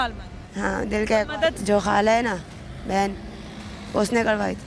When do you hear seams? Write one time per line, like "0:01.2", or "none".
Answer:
0:01.6